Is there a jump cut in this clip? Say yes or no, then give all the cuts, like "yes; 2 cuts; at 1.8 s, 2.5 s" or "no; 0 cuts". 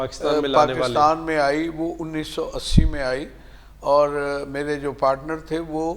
no; 0 cuts